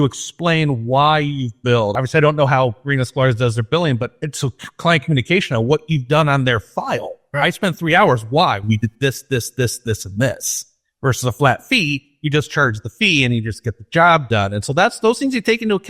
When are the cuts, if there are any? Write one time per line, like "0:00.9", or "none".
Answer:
0:01.9
0:04.2
0:07.2